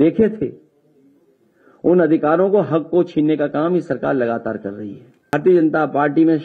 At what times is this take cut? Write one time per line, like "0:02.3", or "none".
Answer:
0:05.3